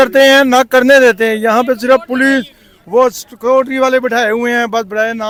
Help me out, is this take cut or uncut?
uncut